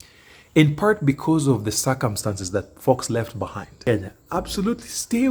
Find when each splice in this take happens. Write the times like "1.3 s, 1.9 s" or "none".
3.8 s